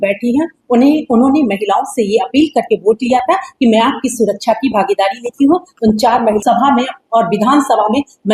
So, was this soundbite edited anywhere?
yes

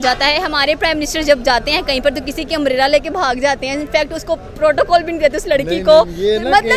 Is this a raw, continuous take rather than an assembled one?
yes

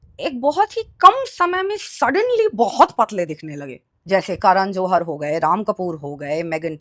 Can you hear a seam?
no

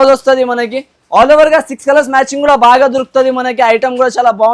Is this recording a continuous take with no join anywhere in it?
yes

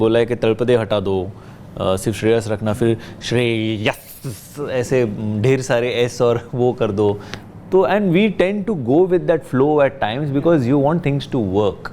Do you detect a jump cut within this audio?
no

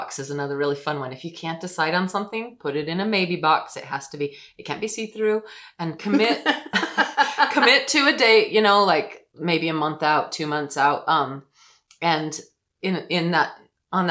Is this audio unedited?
yes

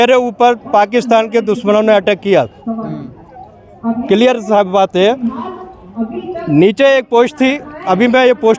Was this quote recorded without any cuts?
yes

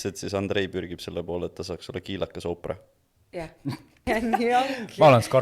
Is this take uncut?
no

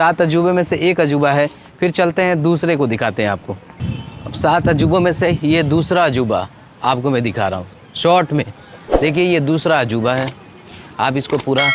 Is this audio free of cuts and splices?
yes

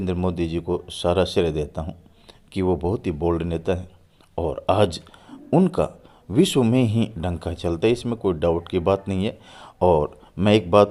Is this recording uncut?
yes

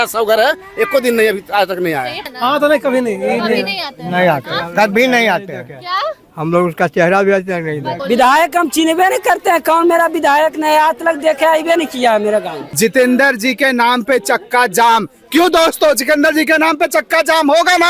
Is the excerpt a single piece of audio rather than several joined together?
no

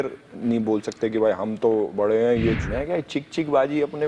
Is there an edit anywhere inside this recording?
yes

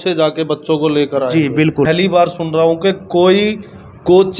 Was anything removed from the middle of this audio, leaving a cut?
yes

